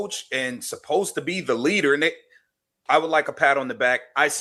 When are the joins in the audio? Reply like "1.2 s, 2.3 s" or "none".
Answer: none

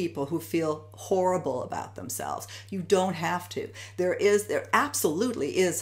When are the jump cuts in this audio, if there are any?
none

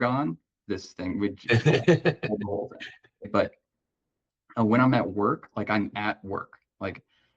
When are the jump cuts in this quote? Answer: 3.3 s

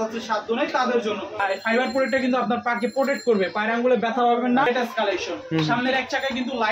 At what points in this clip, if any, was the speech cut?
1.3 s, 4.7 s

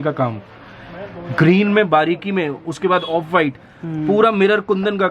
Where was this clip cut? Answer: none

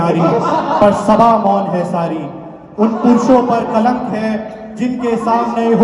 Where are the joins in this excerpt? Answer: none

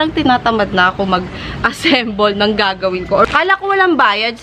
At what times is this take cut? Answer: 3.3 s

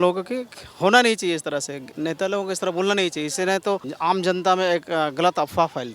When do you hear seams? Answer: 1.8 s, 3.9 s

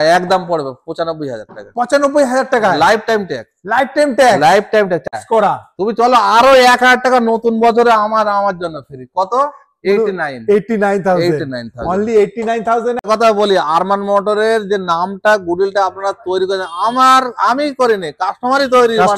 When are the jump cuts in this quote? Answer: 5.1 s, 13.0 s

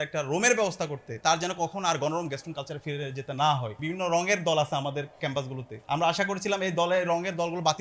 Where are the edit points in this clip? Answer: 1.1 s, 3.7 s

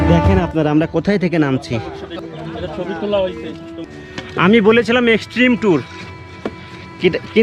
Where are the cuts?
3.8 s

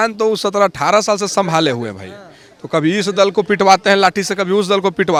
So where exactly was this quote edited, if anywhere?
none

